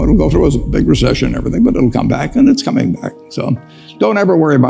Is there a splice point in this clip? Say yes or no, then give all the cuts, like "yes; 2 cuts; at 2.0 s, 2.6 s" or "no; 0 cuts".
no; 0 cuts